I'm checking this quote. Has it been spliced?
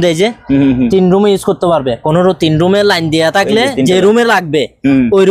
no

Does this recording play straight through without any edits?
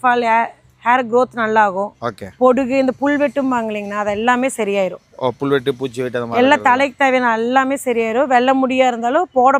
yes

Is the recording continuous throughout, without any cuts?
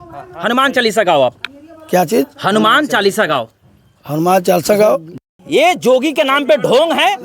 no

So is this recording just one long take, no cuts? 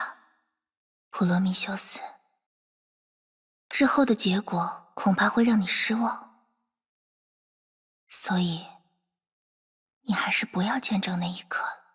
yes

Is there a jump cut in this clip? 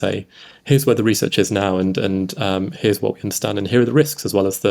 no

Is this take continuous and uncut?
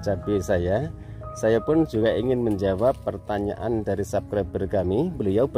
yes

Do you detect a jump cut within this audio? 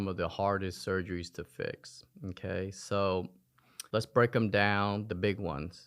no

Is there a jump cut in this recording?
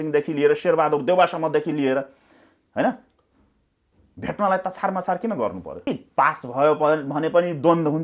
yes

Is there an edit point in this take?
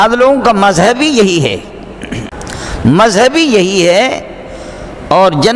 yes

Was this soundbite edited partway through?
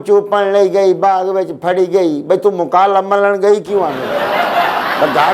no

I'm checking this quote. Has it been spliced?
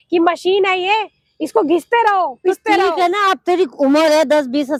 no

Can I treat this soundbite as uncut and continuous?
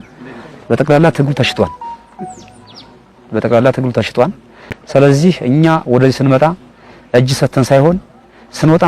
yes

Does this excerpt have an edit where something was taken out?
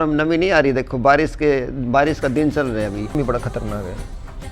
yes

